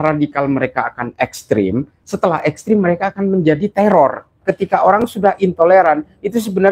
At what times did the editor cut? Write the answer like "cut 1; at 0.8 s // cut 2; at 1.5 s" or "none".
cut 1; at 4.3 s